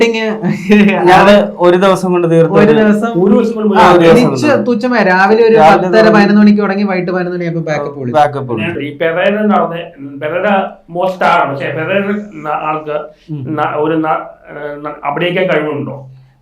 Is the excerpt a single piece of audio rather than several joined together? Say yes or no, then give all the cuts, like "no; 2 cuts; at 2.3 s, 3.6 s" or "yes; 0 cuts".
no; 1 cut; at 8.7 s